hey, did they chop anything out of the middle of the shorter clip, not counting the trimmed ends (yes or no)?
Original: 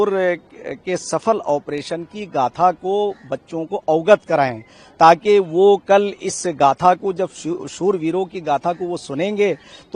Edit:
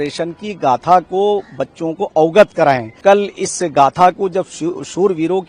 yes